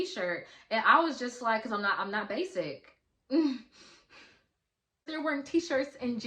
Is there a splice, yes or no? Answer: yes